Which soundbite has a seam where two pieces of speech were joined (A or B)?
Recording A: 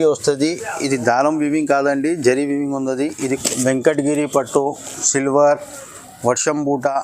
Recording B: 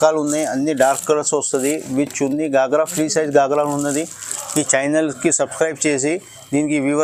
A